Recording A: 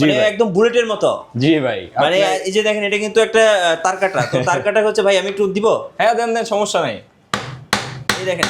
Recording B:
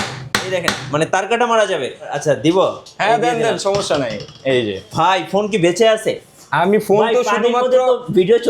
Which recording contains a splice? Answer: B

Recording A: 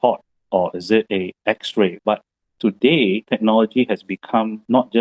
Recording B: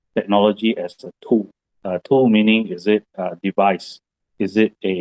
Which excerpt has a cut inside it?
A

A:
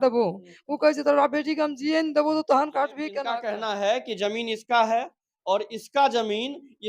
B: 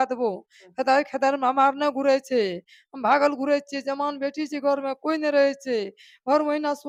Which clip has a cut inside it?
A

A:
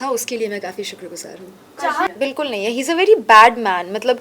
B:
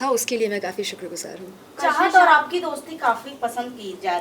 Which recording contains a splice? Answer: A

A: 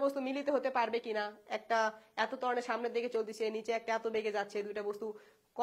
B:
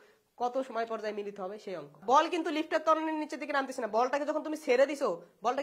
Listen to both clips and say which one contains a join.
B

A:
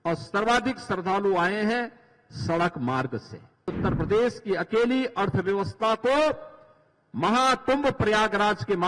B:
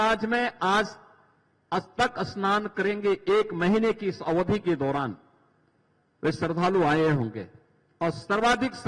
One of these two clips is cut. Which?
A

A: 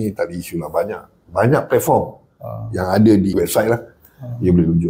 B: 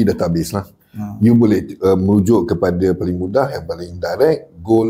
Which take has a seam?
A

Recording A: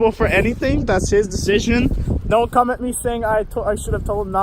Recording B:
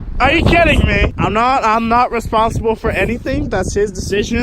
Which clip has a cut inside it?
B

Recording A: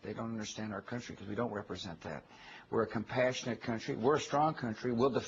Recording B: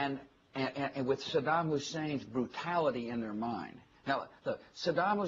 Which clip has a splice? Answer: A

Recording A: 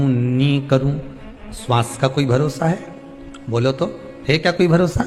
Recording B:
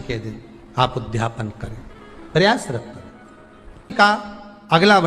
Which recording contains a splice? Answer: B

